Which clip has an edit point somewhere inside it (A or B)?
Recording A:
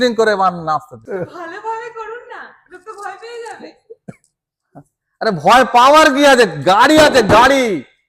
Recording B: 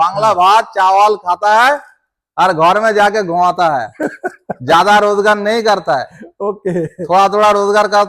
A